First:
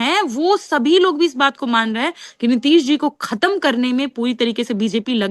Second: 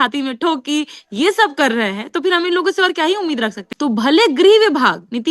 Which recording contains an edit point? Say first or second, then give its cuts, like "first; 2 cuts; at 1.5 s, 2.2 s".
second; 1 cut; at 3.6 s